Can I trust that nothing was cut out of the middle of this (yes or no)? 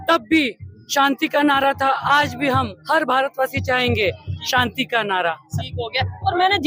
yes